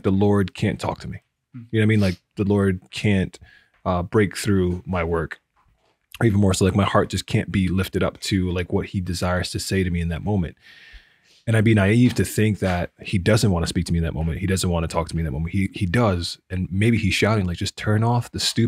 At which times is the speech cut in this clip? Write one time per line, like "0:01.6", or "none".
none